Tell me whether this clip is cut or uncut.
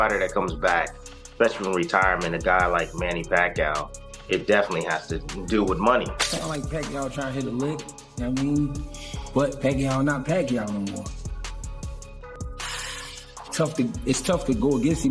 cut